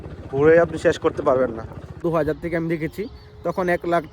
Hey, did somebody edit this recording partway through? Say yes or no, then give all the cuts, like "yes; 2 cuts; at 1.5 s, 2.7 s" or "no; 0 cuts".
yes; 1 cut; at 2.0 s